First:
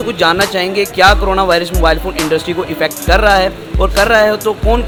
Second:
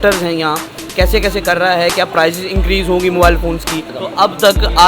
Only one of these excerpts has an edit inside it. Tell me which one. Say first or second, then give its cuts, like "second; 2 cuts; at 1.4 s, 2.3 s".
second; 1 cut; at 4.0 s